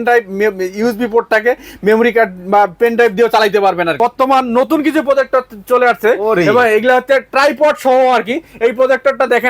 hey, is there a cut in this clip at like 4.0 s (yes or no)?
yes